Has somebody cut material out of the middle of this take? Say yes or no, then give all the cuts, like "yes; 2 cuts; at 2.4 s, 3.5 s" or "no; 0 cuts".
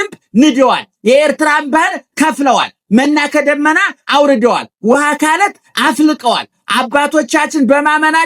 no; 0 cuts